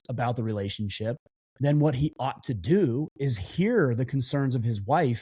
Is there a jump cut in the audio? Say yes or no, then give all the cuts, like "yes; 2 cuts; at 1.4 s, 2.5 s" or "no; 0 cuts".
no; 0 cuts